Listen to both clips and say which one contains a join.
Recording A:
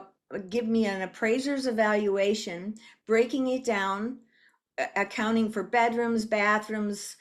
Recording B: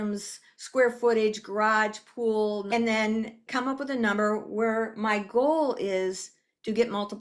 B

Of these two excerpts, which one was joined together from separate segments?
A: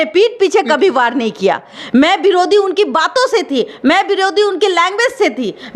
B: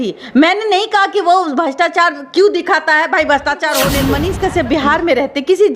B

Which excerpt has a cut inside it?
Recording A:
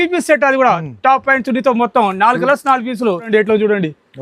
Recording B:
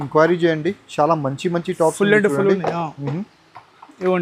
A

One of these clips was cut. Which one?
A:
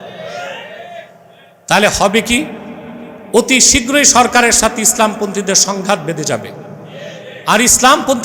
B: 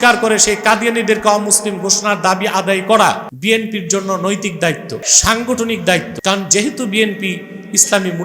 B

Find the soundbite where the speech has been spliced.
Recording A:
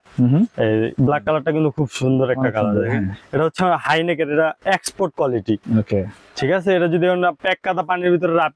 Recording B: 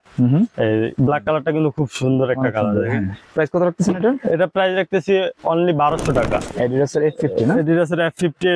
B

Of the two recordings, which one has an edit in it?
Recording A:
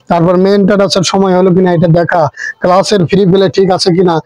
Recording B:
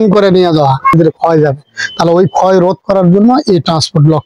B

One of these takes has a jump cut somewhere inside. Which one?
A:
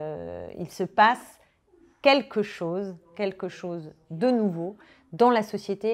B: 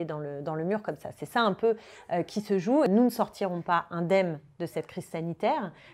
B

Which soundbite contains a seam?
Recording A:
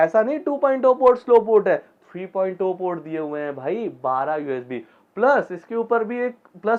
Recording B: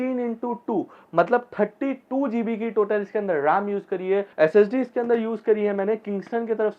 B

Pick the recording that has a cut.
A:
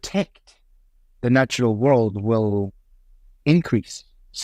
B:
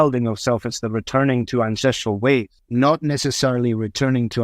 B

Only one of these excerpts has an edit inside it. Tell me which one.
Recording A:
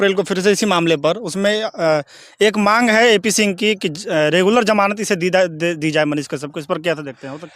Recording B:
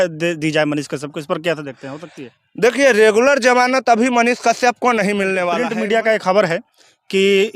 B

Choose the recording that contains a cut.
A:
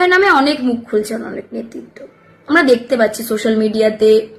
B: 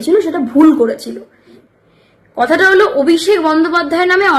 B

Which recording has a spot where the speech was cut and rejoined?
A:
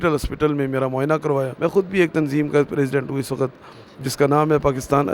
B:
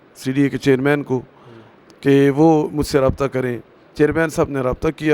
A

